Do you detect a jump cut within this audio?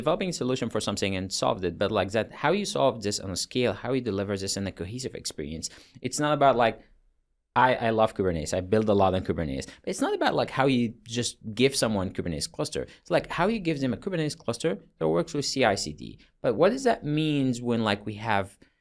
no; 0 cuts

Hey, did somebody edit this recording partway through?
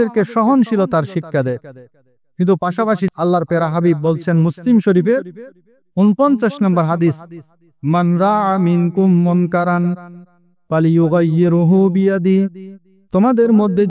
yes; 1 cut; at 3.1 s

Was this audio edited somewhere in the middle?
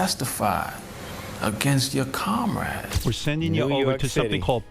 yes; 1 cut; at 2.9 s

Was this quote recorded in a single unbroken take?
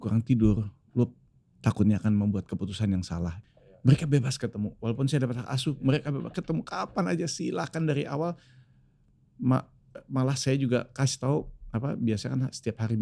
no; 1 cut; at 3.4 s

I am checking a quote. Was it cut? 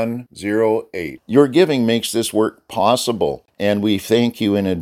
yes; 1 cut; at 3.5 s

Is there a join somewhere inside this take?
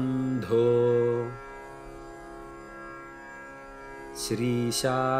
no; 0 cuts

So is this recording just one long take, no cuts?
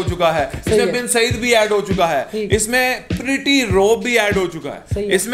yes; 0 cuts

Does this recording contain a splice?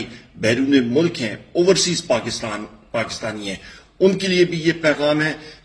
no; 0 cuts

